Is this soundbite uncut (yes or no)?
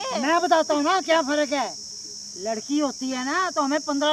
yes